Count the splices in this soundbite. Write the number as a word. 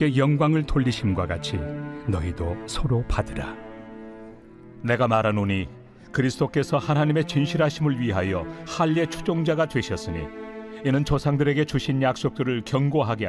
one